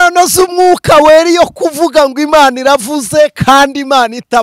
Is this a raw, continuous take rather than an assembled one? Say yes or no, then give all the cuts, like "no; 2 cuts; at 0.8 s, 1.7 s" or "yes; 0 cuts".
yes; 0 cuts